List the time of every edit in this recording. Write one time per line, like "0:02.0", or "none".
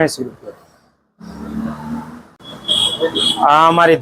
0:02.3